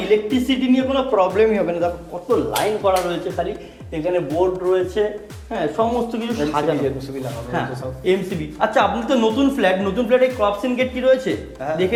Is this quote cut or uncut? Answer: uncut